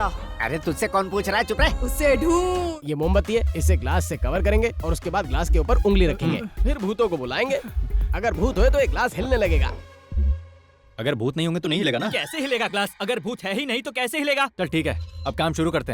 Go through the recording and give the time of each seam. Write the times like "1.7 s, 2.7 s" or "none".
2.7 s, 14.5 s